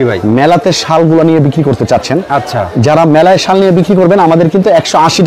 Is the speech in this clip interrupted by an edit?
no; 0 cuts

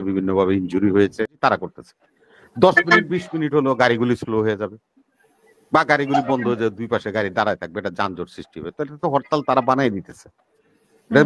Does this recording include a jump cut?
yes; 1 cut; at 1.3 s

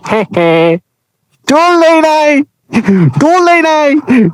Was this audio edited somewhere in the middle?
no; 0 cuts

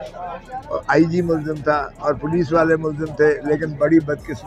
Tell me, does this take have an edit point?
no; 0 cuts

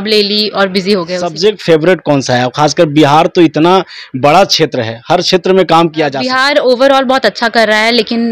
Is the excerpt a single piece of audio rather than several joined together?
no; 2 cuts; at 1.3 s, 6.2 s

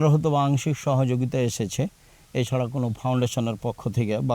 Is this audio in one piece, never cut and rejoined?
yes; 0 cuts

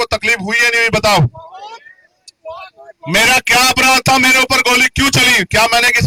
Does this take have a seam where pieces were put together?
no; 0 cuts

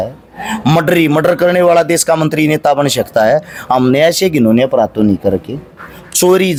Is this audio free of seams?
yes; 0 cuts

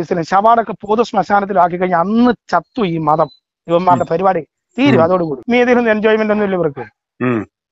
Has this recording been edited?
yes; 1 cut; at 5.5 s

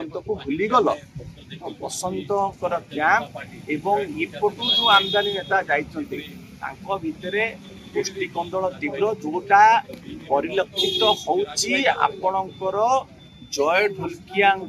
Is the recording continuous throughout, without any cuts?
yes; 0 cuts

